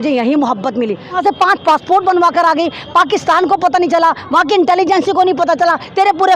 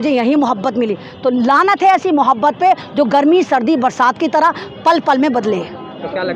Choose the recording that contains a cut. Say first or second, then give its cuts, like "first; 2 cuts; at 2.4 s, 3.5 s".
first; 1 cut; at 1.2 s